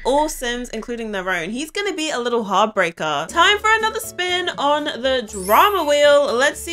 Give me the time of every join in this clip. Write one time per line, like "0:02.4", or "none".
0:03.3

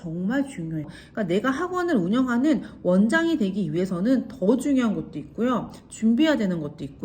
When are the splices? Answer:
0:01.0

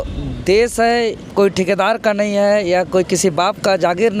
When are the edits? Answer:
0:01.2

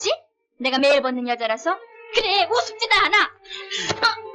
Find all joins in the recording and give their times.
0:01.9

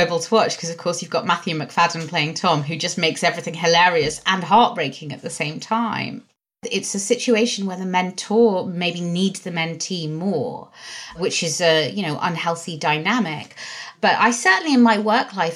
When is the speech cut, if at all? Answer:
0:06.6
0:11.2
0:13.9

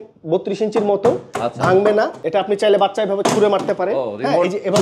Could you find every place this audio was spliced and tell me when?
0:02.2

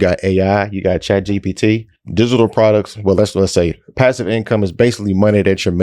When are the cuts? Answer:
0:02.0

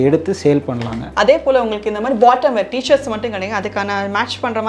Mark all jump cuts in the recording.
0:01.1

